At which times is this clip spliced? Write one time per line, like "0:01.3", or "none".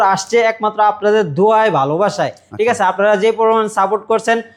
none